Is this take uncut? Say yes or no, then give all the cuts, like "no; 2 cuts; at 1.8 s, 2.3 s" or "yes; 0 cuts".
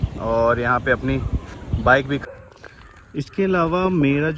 no; 1 cut; at 2.2 s